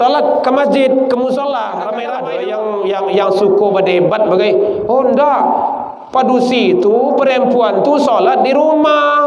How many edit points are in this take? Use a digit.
1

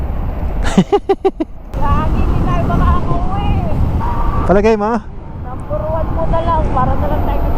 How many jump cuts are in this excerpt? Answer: 1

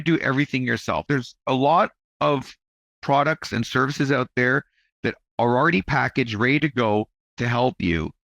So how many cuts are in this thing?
1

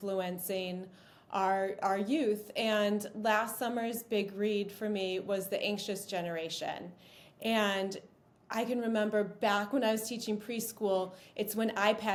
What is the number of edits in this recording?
0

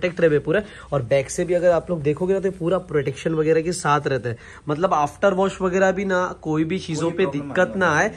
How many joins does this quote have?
0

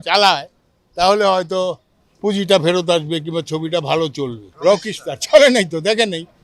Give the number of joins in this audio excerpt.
1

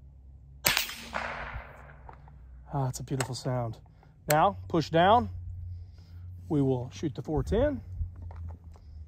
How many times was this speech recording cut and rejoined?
0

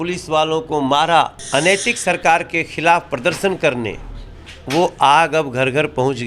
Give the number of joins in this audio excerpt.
1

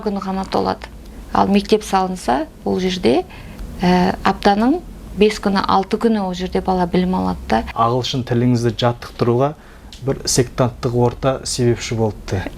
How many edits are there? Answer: 1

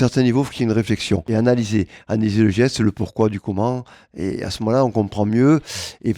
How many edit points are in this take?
1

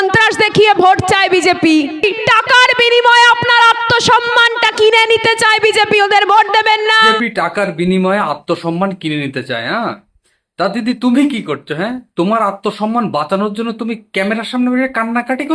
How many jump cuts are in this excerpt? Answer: 2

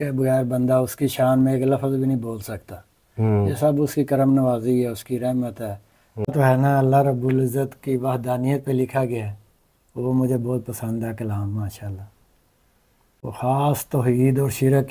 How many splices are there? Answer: 2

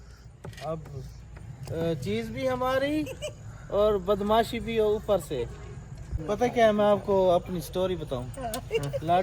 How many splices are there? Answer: 1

